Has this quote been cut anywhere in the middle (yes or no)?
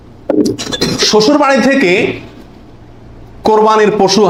no